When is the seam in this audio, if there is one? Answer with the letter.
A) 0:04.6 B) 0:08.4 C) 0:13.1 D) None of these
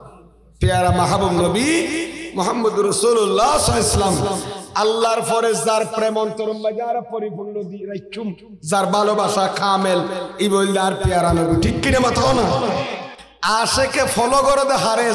C